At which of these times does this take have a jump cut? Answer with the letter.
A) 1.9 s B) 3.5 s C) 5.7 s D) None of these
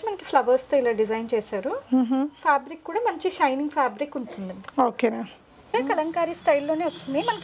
C